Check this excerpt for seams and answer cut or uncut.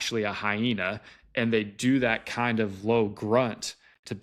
uncut